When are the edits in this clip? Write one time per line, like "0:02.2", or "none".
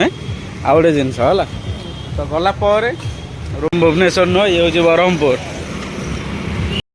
0:03.7